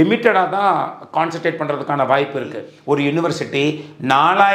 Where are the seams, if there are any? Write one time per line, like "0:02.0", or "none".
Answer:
0:02.7